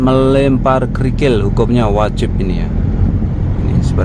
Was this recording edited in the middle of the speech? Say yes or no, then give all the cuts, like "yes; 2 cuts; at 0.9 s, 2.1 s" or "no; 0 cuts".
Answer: no; 0 cuts